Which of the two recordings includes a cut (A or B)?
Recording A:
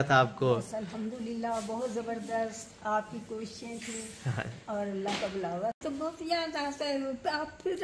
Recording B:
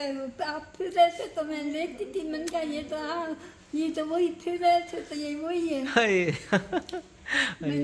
A